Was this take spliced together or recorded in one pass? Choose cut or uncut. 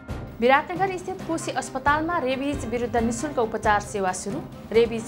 uncut